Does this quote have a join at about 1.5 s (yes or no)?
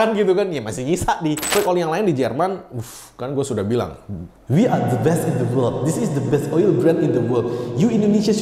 yes